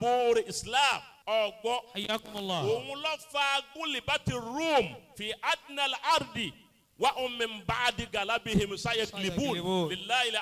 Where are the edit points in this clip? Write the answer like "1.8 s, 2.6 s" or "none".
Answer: 1.1 s